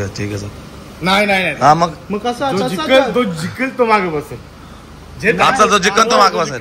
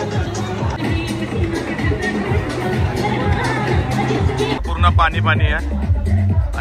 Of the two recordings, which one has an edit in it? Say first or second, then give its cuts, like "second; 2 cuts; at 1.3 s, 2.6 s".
second; 2 cuts; at 0.8 s, 4.6 s